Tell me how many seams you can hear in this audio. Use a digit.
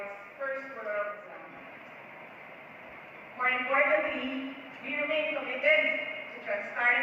1